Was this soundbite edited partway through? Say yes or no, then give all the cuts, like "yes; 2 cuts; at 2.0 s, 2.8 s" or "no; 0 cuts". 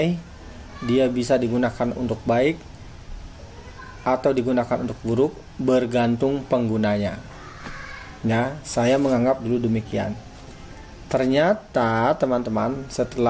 no; 0 cuts